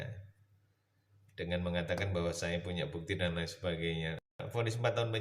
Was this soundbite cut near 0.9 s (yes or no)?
no